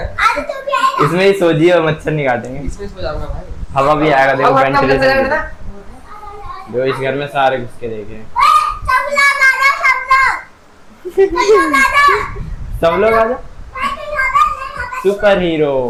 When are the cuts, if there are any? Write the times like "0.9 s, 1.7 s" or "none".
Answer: none